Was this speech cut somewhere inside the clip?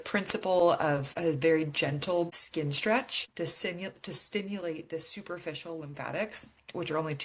yes; 3 cuts; at 1.1 s, 2.4 s, 3.2 s

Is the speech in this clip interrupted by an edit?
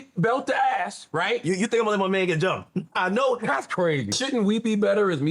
yes; 1 cut; at 4.2 s

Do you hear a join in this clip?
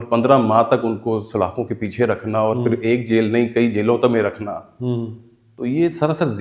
no; 0 cuts

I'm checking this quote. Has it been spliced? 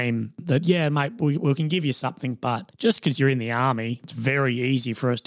yes; 3 cuts; at 0.8 s, 2.7 s, 4.1 s

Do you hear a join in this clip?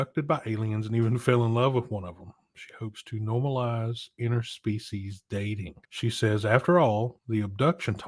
yes; 2 cuts; at 5.8 s, 7.2 s

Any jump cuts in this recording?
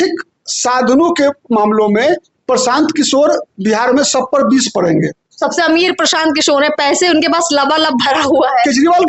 no; 0 cuts

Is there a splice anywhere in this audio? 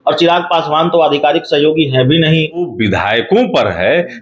yes; 1 cut; at 2.7 s

